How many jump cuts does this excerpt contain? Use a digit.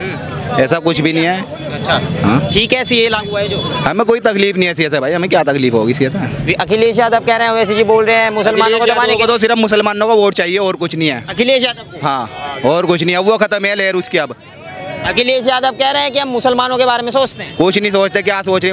0